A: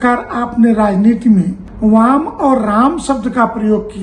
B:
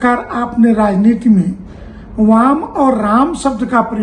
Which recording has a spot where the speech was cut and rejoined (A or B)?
A